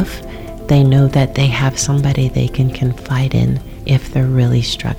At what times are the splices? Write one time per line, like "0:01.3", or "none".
0:03.7